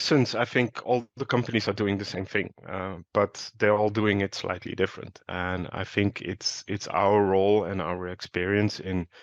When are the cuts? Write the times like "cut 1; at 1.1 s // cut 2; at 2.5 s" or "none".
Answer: none